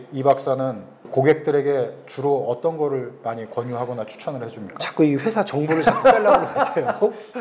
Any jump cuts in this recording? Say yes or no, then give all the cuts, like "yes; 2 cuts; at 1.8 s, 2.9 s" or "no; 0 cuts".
yes; 1 cut; at 1.1 s